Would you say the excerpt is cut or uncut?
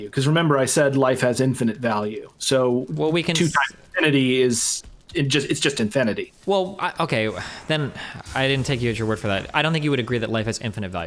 uncut